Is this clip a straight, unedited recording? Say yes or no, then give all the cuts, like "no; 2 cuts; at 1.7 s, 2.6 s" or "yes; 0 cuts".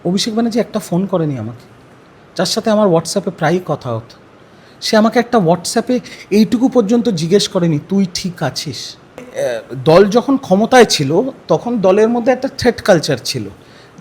no; 1 cut; at 9.3 s